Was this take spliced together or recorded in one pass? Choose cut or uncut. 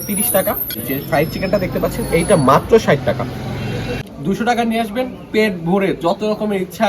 cut